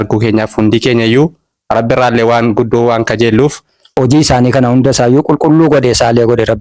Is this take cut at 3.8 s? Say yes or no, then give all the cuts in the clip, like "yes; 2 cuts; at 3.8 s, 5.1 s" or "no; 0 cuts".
yes; 1 cut; at 3.8 s